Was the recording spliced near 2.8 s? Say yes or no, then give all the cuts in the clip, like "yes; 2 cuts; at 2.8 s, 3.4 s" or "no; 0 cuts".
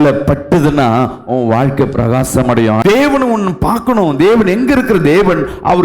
yes; 1 cut; at 2.8 s